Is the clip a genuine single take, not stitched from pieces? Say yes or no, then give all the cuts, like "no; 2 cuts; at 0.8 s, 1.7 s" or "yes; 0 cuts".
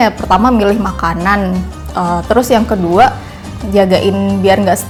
yes; 0 cuts